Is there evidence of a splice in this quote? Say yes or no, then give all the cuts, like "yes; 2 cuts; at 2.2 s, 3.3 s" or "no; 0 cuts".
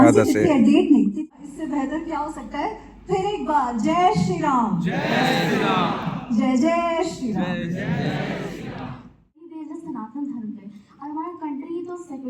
yes; 2 cuts; at 1.1 s, 9.6 s